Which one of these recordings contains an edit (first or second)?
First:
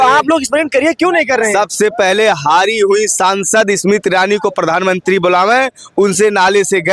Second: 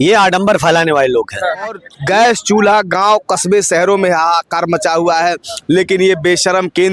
second